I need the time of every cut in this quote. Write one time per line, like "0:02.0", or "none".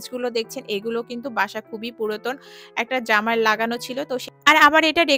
0:04.3